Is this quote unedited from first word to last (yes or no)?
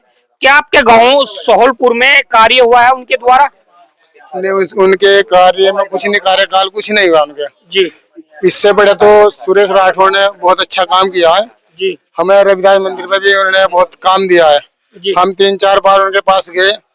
yes